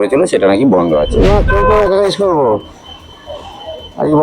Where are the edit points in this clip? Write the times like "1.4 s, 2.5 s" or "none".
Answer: 1.1 s